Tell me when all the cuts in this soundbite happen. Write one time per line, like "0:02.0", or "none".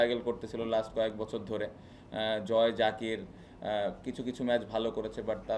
none

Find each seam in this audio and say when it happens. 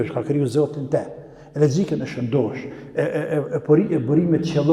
none

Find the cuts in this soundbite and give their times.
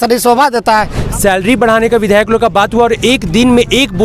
0:01.0

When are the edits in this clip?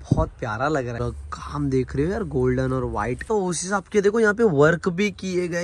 0:01.0
0:03.3

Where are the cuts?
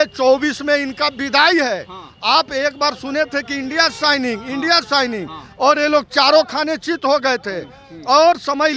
none

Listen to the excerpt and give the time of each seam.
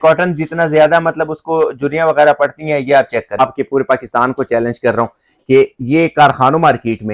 0:03.4

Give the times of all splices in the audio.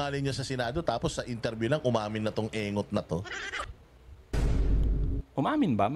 none

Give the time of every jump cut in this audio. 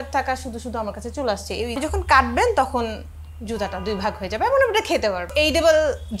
0:01.8
0:05.3

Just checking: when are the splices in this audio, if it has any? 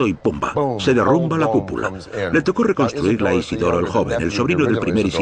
0:04.0

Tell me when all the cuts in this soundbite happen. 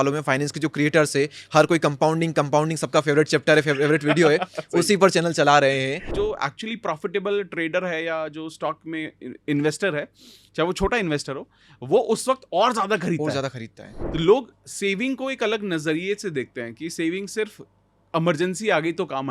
0:06.1
0:14.0

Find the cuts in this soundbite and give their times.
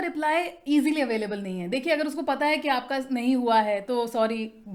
none

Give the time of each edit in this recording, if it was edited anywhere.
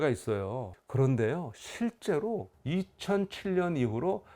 0:02.5

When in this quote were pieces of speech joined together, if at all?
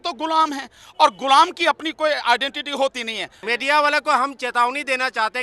0:03.4

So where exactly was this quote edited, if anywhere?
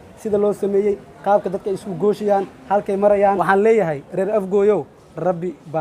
0:03.4

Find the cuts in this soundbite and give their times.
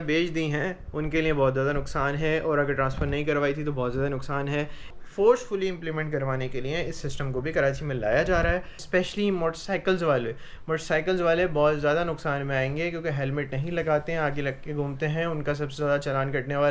0:04.9
0:08.8

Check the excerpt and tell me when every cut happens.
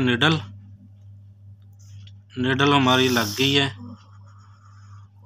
none

